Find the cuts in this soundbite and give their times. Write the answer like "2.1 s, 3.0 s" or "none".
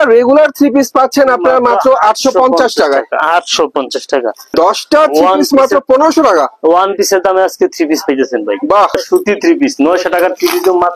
4.5 s, 9.0 s